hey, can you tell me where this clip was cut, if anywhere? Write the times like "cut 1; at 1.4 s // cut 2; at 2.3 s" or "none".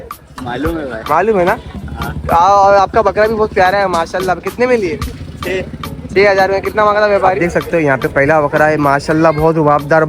cut 1; at 7.4 s